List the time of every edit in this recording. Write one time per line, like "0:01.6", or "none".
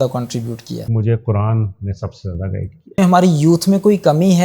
0:00.9
0:03.0